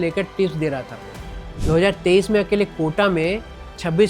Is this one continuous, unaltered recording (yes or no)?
no